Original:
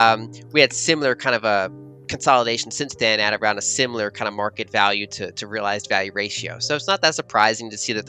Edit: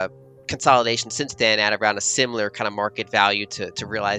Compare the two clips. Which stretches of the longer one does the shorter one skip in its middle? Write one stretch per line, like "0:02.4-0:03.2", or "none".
none